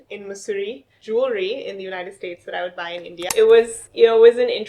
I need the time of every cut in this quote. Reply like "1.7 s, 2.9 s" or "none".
0.9 s, 3.2 s